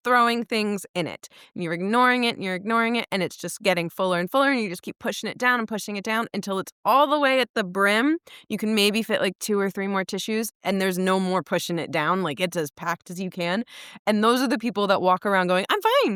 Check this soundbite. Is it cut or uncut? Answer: uncut